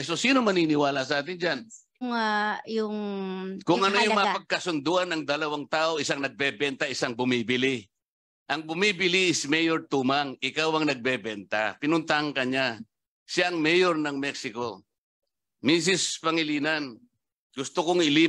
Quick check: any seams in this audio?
yes; 1 cut; at 2.0 s

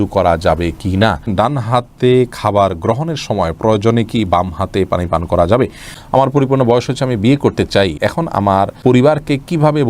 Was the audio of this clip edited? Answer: yes; 3 cuts; at 1.3 s, 5.9 s, 8.4 s

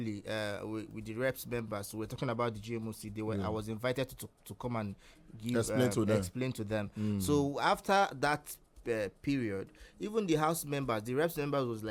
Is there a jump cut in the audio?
no; 0 cuts

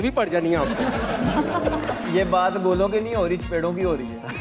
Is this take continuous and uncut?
no; 1 cut; at 2.1 s

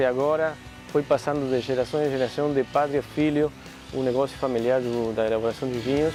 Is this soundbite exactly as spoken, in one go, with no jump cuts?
yes; 0 cuts

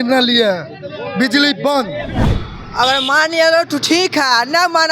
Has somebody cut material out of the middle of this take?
yes; 1 cut; at 2.2 s

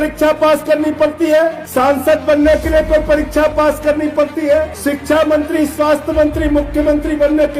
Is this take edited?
yes; 2 cuts; at 1.6 s, 4.7 s

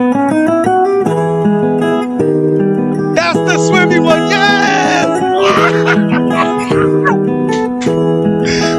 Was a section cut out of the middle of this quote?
yes; 1 cut; at 2.6 s

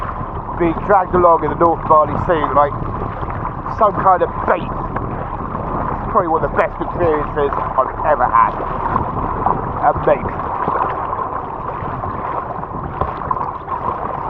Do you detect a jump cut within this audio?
no; 0 cuts

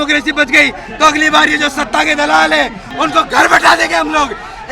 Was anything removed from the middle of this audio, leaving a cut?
yes; 1 cut; at 2.8 s

